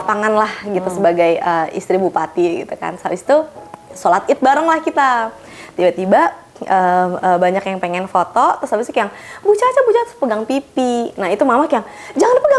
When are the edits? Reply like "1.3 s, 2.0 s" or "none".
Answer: none